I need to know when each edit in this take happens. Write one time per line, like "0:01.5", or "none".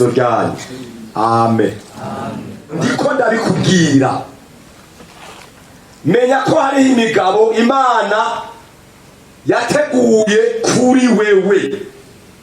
0:02.8